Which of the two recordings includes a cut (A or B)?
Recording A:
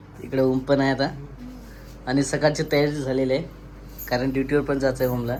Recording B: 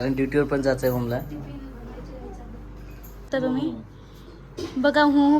B